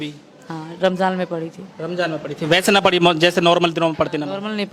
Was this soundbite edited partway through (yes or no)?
no